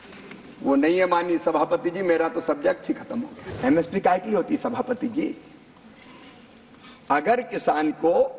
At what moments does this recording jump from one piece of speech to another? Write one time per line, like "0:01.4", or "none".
0:03.4

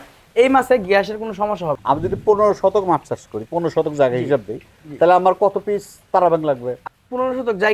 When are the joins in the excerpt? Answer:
0:01.8

